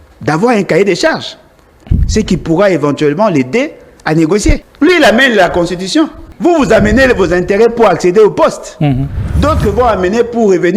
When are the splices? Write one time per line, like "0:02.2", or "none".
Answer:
0:04.7
0:06.2

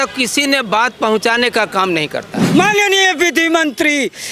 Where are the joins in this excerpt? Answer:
0:02.4

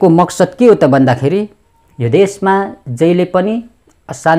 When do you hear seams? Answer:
none

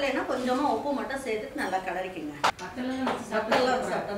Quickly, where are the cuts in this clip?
0:02.5

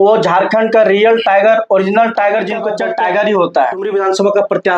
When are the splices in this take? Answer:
0:02.7
0:03.9

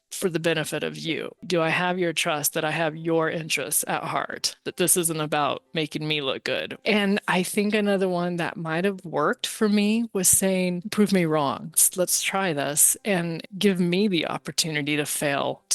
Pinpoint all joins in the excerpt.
0:13.4

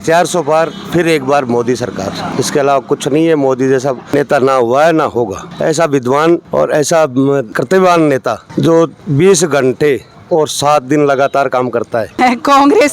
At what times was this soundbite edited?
0:02.3
0:04.1
0:05.4
0:06.5
0:07.5
0:12.1

